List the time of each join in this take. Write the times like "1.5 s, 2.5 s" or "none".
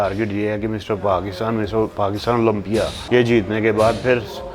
3.0 s